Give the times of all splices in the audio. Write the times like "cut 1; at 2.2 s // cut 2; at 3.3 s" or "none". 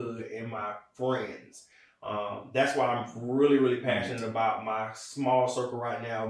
none